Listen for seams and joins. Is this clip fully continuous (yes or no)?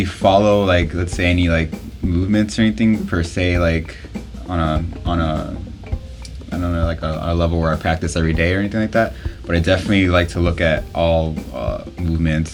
yes